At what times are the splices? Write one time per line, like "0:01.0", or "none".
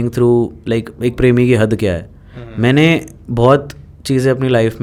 none